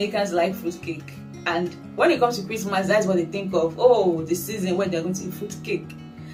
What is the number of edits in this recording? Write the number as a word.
zero